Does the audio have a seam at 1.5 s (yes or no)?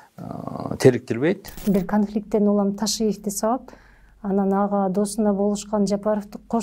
yes